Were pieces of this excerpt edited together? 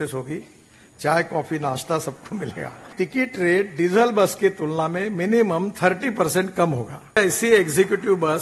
yes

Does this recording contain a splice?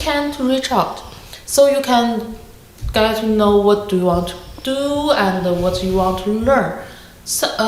no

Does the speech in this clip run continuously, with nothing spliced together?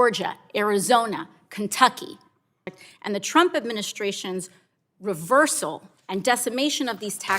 no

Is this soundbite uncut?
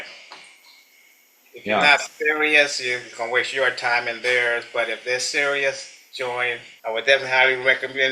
no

